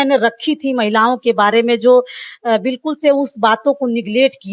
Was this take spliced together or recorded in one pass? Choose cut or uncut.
uncut